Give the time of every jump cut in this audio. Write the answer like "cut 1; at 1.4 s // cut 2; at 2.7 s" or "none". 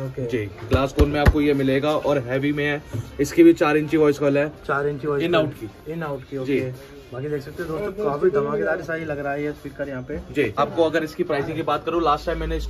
cut 1; at 10.5 s